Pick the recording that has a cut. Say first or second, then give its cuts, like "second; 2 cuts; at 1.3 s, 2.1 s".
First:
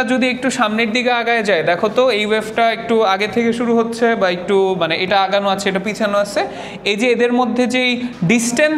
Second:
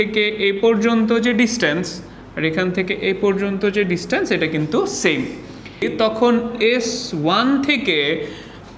second; 1 cut; at 5.8 s